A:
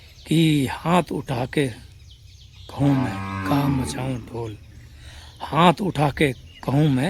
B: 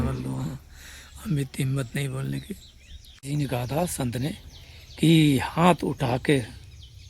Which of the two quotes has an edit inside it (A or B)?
B